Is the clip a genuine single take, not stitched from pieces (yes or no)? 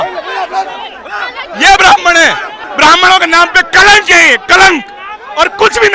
no